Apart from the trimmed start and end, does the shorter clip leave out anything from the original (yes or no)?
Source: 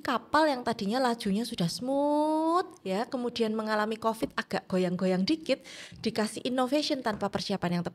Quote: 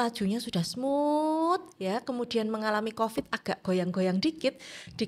no